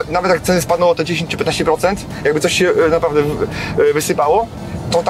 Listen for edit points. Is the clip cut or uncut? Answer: uncut